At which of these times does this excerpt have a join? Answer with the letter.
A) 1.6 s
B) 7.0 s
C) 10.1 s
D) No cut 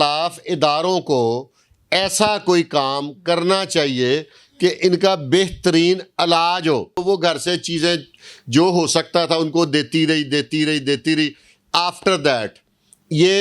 B